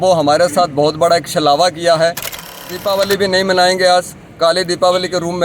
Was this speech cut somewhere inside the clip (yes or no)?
yes